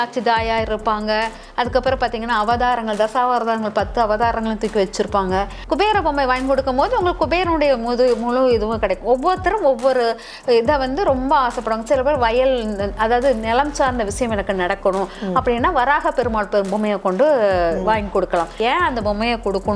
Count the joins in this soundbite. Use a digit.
2